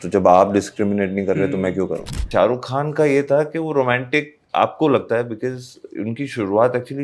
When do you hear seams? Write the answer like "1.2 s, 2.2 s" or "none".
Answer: 2.2 s